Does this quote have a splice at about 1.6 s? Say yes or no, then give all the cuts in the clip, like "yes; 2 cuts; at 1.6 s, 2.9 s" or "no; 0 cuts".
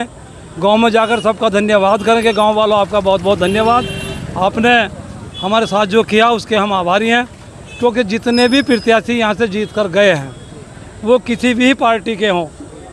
no; 0 cuts